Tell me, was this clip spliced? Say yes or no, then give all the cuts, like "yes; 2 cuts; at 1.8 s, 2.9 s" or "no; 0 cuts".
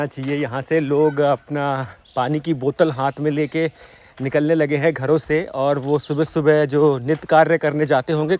no; 0 cuts